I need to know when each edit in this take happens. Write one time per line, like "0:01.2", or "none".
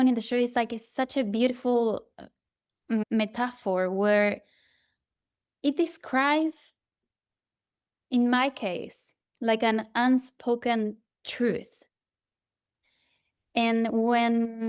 0:03.0